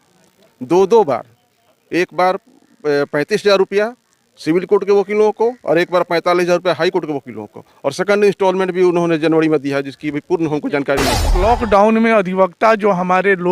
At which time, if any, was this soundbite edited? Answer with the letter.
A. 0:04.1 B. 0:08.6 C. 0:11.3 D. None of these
C